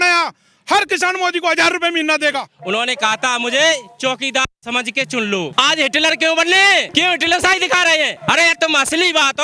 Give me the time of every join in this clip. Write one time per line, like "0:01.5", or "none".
0:02.5
0:05.5
0:06.9
0:08.2